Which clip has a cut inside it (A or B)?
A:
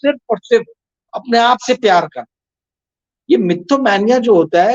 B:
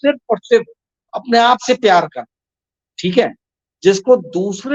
A